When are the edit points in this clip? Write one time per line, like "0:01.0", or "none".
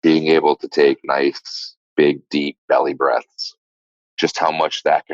0:03.8